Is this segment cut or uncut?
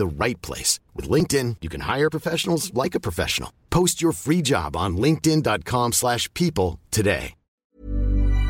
cut